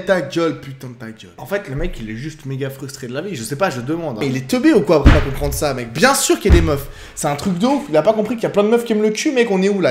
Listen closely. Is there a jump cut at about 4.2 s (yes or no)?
yes